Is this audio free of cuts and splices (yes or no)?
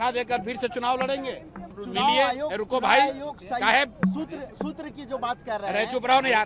no